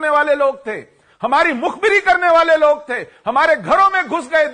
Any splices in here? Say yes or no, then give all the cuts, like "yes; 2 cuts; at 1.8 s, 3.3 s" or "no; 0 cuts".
no; 0 cuts